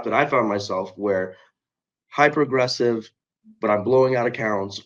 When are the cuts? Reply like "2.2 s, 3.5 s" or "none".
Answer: none